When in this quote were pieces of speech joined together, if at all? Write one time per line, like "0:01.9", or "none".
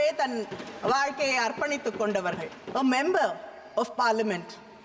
0:02.5